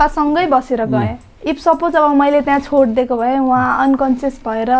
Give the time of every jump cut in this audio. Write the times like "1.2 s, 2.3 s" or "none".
none